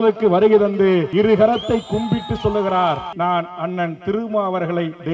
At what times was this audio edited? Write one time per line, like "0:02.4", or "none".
0:01.1
0:03.1

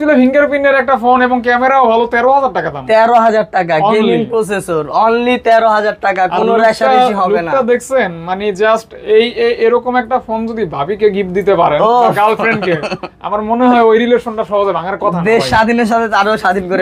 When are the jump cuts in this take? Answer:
none

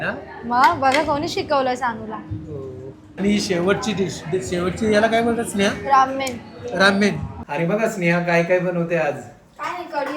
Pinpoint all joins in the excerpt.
0:03.2
0:07.3

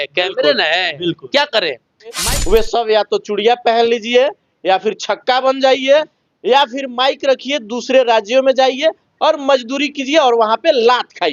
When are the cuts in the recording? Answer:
0:02.2

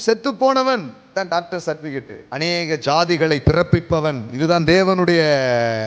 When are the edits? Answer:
0:01.0
0:02.2

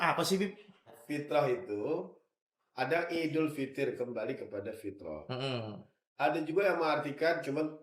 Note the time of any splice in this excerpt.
0:01.0

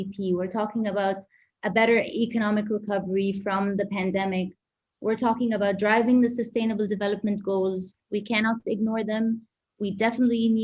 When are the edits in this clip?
0:08.0

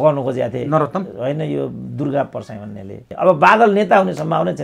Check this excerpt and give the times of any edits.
0:03.0

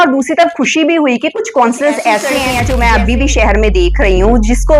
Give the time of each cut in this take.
0:02.5

